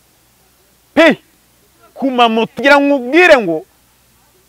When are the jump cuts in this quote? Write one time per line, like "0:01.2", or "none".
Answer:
0:02.6